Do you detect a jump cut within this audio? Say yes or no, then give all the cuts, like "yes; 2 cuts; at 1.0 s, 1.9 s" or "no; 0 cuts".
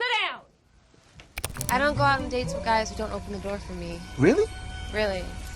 yes; 1 cut; at 1.5 s